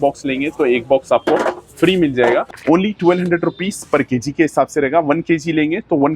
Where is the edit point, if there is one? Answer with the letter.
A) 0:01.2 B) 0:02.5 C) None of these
B